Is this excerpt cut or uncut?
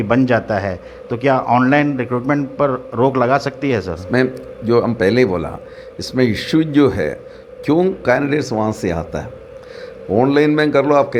uncut